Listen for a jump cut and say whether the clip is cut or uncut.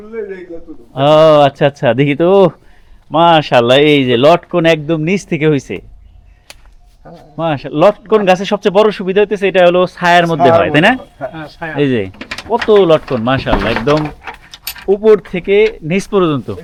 uncut